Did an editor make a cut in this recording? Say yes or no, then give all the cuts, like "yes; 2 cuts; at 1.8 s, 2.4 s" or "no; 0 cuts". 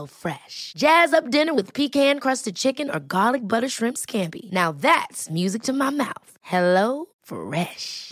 no; 0 cuts